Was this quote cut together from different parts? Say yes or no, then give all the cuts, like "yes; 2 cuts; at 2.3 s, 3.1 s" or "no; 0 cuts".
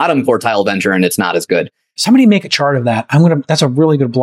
yes; 1 cut; at 1.9 s